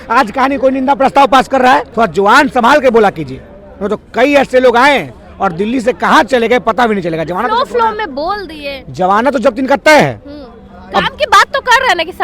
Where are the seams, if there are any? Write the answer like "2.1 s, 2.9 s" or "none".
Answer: none

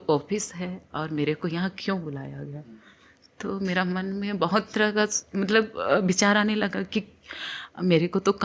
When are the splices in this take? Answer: none

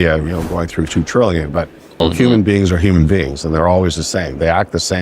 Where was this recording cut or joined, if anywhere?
2.0 s

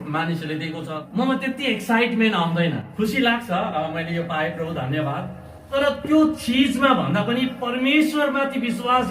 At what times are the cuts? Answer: 1.0 s, 2.9 s, 5.6 s

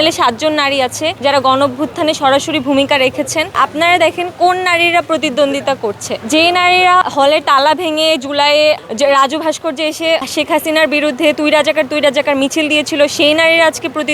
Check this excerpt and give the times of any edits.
1.1 s, 3.6 s, 7.0 s, 10.3 s

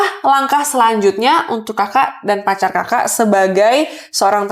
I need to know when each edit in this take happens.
none

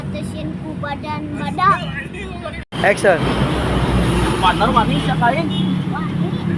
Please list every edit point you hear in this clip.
none

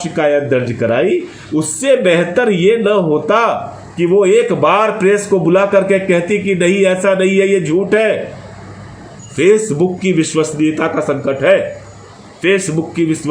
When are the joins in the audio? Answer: 9.2 s

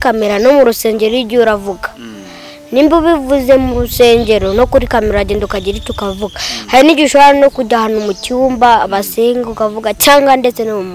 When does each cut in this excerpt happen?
none

